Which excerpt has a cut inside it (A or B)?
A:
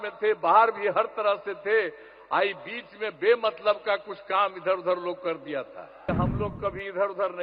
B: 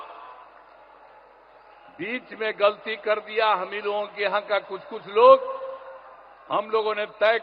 A